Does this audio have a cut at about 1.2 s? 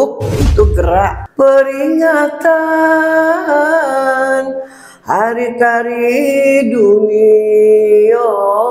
yes; 1 cut; at 1.2 s

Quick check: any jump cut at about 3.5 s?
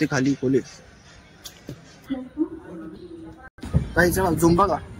no; 1 cut; at 2.0 s

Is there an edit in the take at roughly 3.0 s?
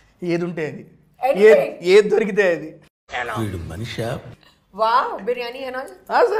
no; 0 cuts

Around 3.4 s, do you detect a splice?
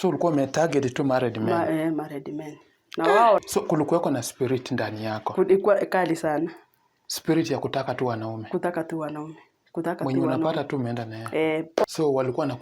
yes; 2 cuts; at 3.4 s, 11.8 s

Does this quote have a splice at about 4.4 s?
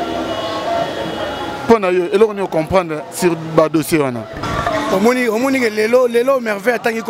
yes; 1 cut; at 4.4 s

